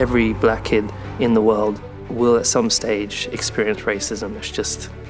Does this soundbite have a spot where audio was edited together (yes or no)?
no